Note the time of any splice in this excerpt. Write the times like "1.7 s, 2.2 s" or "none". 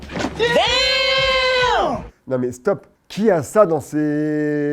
2.1 s